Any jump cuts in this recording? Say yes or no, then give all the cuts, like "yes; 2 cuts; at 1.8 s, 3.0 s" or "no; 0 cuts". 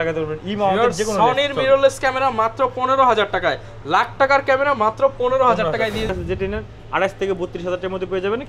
yes; 1 cut; at 6.1 s